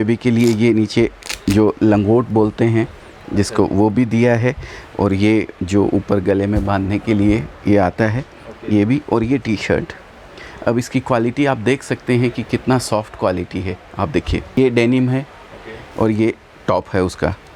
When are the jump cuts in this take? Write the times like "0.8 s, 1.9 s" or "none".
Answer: 14.6 s